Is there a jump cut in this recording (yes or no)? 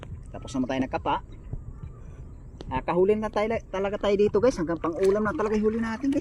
no